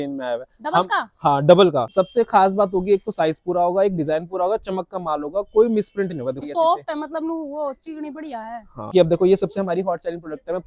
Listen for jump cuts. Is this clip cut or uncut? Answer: cut